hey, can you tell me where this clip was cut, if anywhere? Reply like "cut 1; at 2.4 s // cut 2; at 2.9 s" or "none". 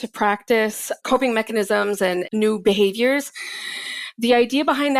cut 1; at 1.0 s // cut 2; at 2.2 s